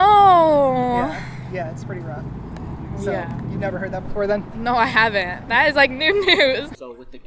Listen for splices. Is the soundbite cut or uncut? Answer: uncut